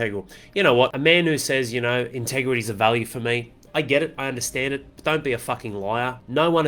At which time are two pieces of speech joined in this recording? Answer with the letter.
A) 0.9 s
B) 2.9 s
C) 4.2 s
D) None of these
A